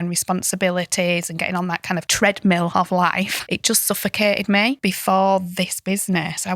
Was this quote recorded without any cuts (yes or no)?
no